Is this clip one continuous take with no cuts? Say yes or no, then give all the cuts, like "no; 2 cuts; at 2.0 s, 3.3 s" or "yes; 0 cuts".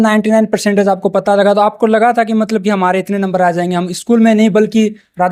yes; 0 cuts